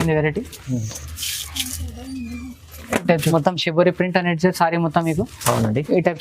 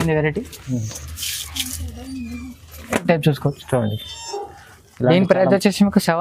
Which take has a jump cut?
first; 1 cut; at 3.2 s

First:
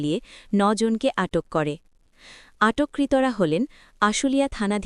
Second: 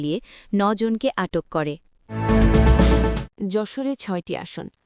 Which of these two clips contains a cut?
second; 2 cuts; at 2.0 s, 3.2 s

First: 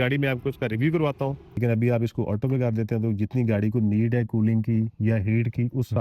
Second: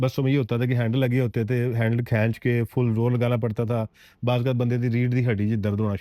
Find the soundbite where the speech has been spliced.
first; 1 cut; at 1.5 s

